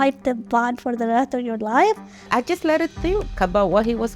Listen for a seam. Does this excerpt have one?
yes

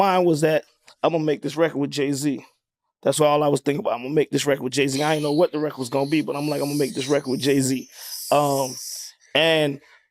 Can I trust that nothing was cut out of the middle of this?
yes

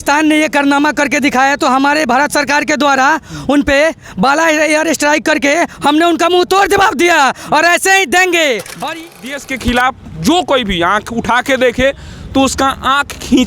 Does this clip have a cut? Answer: yes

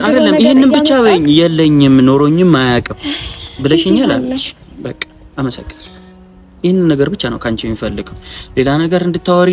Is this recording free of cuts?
yes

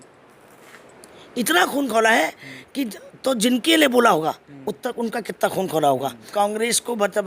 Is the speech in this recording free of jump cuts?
no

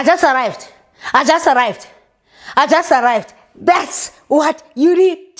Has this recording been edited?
no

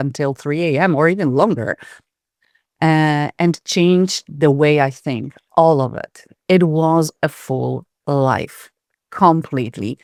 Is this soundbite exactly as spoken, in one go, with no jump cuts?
yes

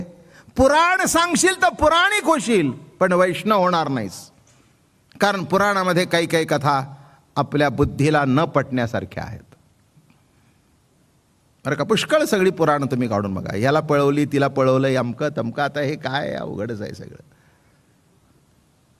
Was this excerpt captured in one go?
yes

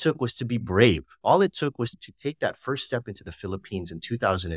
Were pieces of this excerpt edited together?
yes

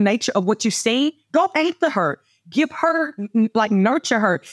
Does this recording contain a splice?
no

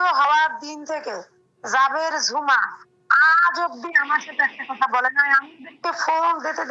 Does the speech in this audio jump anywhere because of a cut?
no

